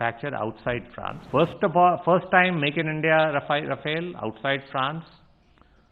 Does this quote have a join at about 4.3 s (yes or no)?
no